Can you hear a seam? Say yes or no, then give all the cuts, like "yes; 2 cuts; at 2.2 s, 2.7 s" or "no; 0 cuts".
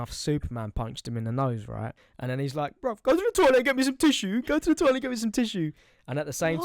yes; 1 cut; at 2.0 s